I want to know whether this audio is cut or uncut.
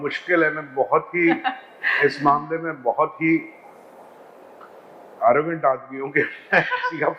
uncut